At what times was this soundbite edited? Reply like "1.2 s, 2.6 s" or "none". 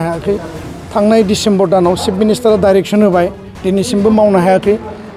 none